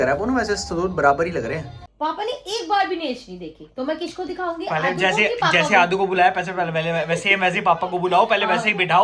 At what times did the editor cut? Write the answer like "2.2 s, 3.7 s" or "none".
1.8 s